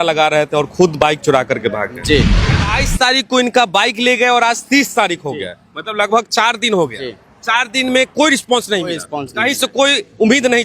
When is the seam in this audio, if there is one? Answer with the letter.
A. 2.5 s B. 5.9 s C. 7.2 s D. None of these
A